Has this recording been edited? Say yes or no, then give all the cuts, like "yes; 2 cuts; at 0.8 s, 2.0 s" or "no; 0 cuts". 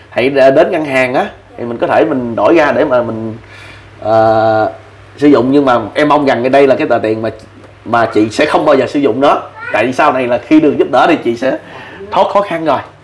no; 0 cuts